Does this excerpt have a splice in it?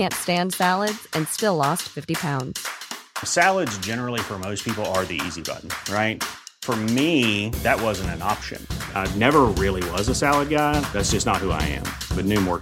no; 0 cuts

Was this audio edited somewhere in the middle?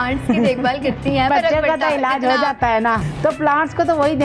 yes; 2 cuts; at 1.3 s, 3.0 s

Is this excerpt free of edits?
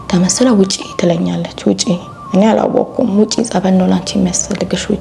yes; 0 cuts

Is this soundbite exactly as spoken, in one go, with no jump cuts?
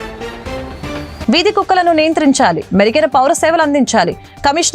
yes; 0 cuts

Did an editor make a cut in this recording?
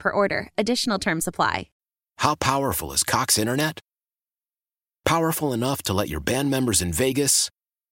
yes; 1 cut; at 1.7 s

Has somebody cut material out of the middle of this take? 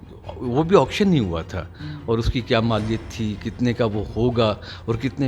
no; 0 cuts

